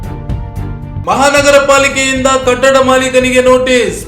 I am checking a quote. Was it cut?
yes; 1 cut; at 1.0 s

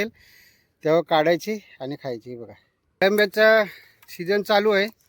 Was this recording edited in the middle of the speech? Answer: yes; 1 cut; at 3.0 s

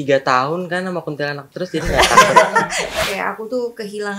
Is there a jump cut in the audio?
yes; 1 cut; at 3.0 s

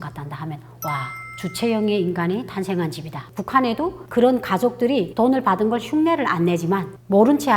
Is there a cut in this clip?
yes; 2 cuts; at 1.2 s, 3.4 s

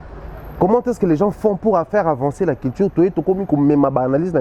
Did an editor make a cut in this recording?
no; 0 cuts

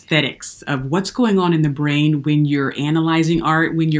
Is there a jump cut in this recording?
no; 0 cuts

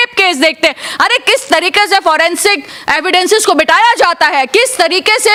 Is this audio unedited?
yes; 0 cuts

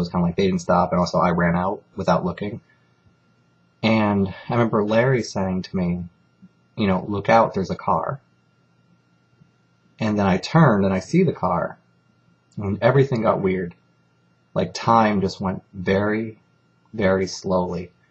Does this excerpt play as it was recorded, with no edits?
yes; 0 cuts

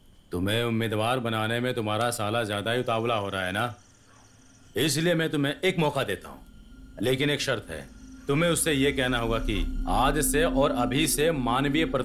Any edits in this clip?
no; 0 cuts

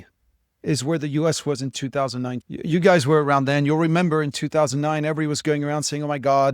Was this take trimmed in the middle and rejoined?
yes; 1 cut; at 2.4 s

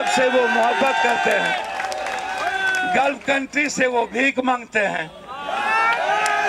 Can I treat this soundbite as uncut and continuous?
yes; 0 cuts

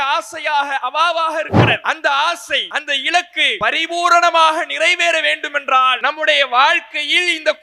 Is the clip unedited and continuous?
no; 4 cuts; at 1.8 s, 2.7 s, 3.5 s, 6.0 s

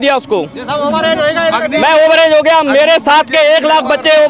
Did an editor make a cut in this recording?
no; 0 cuts

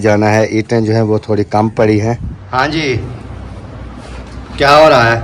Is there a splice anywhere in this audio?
yes; 1 cut; at 2.3 s

